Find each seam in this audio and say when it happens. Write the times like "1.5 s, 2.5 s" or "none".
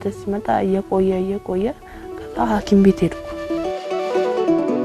3.3 s